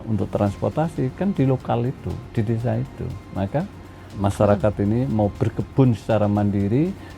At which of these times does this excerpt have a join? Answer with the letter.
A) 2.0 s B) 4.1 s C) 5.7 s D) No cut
B